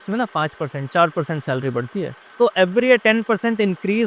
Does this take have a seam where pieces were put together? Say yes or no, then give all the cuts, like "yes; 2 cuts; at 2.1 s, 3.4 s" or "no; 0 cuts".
yes; 1 cut; at 2.2 s